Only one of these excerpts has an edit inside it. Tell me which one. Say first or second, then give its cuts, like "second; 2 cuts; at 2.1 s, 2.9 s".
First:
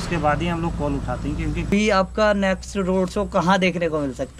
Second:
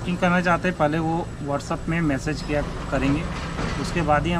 first; 1 cut; at 1.7 s